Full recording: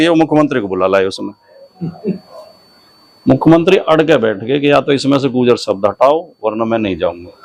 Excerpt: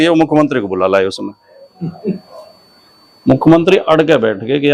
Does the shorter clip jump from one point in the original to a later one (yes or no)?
no